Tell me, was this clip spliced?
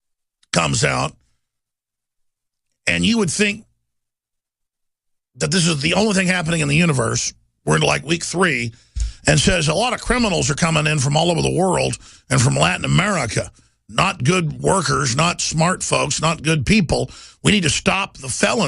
yes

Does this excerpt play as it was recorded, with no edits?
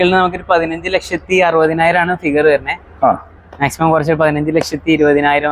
yes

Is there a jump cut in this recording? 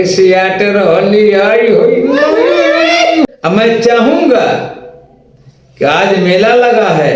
yes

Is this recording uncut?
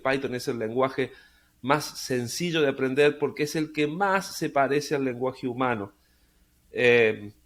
yes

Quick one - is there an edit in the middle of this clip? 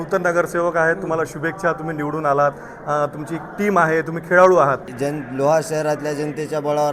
yes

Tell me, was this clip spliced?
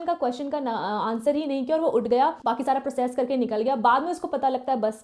no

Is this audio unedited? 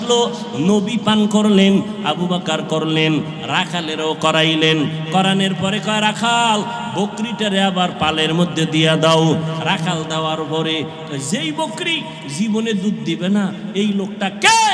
yes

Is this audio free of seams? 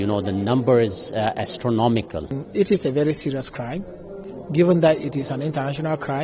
no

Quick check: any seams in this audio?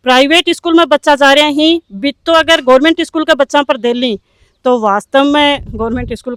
no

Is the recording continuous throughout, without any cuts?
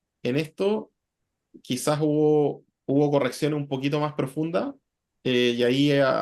yes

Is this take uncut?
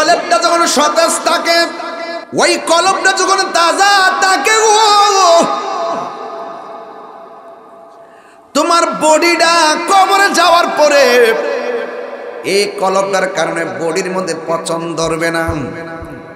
no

